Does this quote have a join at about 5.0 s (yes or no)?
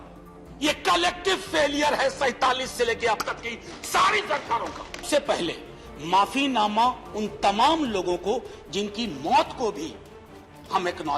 yes